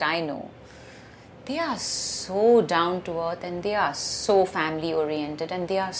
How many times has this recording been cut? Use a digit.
0